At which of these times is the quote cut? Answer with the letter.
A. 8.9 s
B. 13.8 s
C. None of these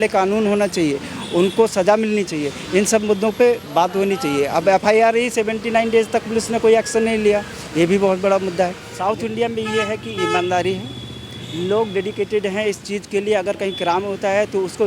A